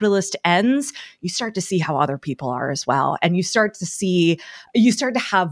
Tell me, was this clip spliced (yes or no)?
no